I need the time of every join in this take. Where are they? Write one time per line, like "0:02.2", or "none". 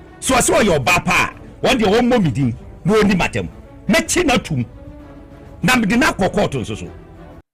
none